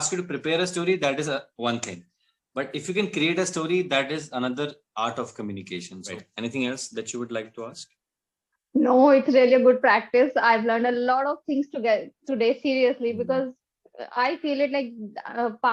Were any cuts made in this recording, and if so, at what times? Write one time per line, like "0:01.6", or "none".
0:06.1